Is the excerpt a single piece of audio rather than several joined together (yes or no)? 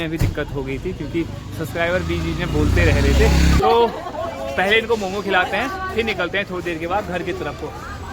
no